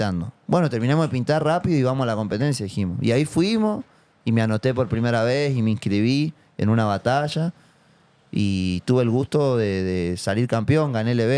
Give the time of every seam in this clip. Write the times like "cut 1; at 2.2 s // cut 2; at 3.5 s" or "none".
none